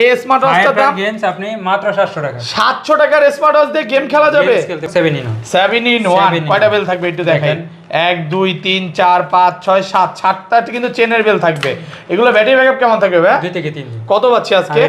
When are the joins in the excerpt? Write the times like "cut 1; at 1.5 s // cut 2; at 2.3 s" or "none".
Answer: cut 1; at 4.9 s